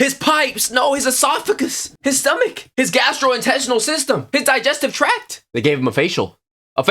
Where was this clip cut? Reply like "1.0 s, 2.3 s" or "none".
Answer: 5.3 s